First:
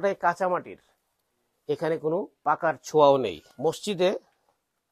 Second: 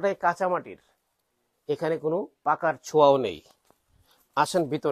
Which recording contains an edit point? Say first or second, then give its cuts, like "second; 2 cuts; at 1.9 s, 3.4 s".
first; 1 cut; at 3.5 s